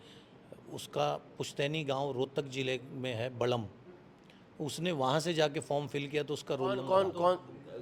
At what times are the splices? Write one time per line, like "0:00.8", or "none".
0:06.8